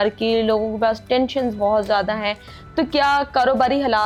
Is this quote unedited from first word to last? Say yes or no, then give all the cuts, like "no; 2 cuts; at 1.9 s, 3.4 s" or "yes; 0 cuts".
yes; 0 cuts